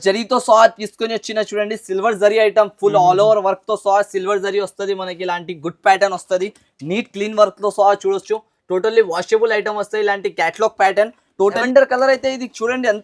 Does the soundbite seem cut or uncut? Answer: cut